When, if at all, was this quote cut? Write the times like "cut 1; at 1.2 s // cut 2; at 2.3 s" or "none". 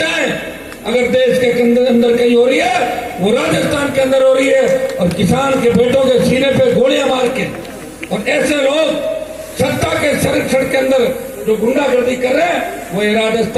none